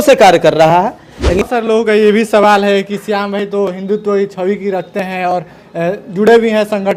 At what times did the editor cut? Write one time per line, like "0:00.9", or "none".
0:01.4